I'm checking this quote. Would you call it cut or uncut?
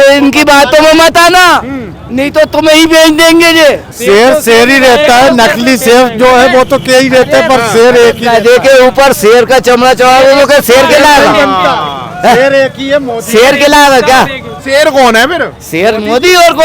cut